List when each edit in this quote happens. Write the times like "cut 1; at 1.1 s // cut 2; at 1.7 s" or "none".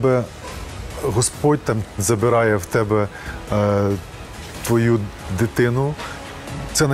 none